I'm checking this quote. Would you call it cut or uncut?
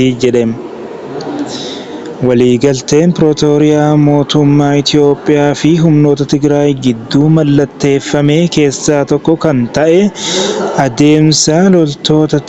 uncut